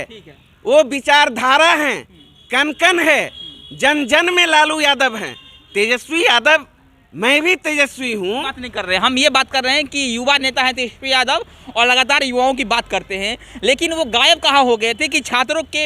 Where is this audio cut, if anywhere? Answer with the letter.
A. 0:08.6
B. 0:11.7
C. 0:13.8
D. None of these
A